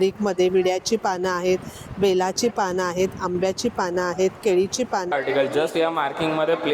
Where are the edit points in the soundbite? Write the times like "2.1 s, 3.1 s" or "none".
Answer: 5.1 s